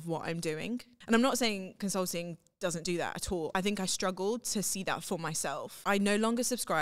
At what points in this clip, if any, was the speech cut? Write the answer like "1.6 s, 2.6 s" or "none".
0.9 s, 3.5 s, 5.7 s